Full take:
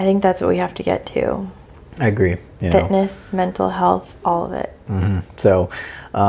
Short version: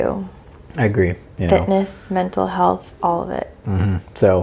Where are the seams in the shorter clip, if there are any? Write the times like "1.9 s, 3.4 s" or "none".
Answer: none